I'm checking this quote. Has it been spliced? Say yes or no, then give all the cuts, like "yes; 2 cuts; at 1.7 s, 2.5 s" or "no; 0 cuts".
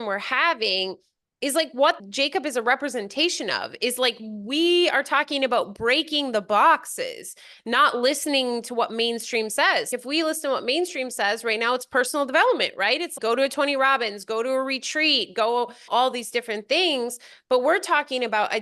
yes; 4 cuts; at 2.0 s, 9.9 s, 13.1 s, 15.9 s